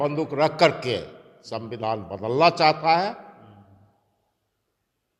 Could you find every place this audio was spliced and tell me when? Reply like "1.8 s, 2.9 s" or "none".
none